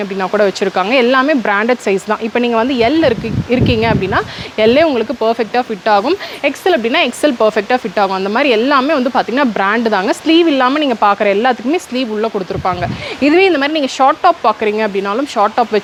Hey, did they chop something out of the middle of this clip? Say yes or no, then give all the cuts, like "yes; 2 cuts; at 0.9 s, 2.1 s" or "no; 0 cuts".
no; 0 cuts